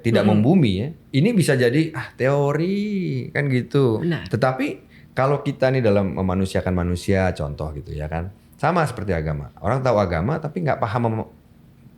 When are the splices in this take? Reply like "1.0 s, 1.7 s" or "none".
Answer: 0.9 s, 4.0 s